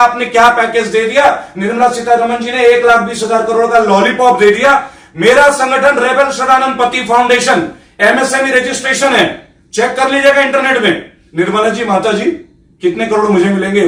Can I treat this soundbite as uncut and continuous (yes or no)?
yes